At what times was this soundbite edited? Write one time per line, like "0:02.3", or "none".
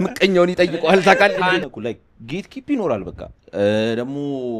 0:01.7